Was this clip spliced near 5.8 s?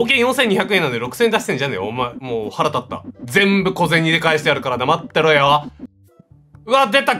yes; 1 cut; at 5.8 s

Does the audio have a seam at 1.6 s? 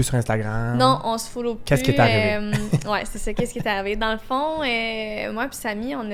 no; 0 cuts

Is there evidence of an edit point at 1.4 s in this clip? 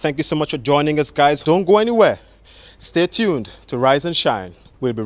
yes; 1 cut; at 1.4 s

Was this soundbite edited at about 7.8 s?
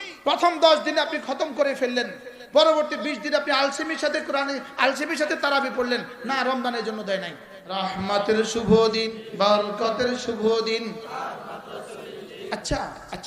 yes; 2 cuts; at 7.8 s, 9.2 s

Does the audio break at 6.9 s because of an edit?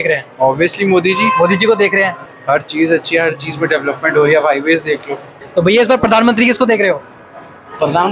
no; 2 cuts; at 2.2 s, 5.4 s

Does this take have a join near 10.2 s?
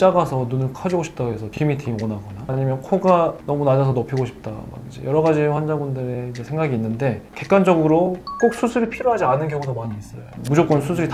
yes; 1 cut; at 10.2 s

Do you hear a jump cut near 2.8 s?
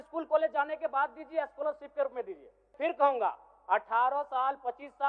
yes; 1 cut; at 2.8 s

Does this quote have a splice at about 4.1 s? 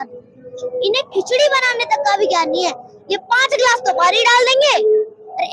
no; 0 cuts

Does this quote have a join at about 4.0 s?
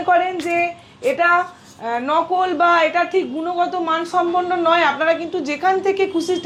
no; 0 cuts

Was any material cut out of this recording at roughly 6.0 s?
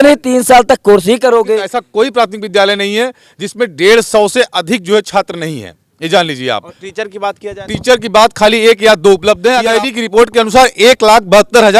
no; 2 cuts; at 1.8 s, 9.6 s

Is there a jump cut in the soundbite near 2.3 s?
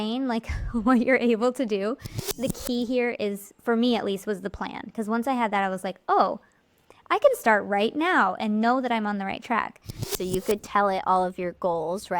yes; 2 cuts; at 2.3 s, 10.1 s

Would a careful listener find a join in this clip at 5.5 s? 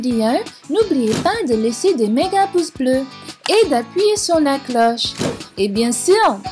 no; 0 cuts

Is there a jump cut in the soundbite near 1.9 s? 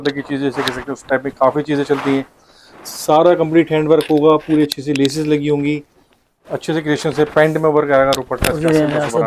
no; 0 cuts

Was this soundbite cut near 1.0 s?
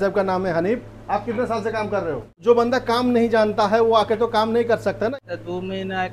no; 2 cuts; at 2.3 s, 5.1 s

